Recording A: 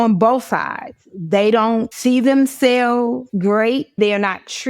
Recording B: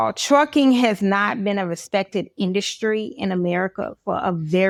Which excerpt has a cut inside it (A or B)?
A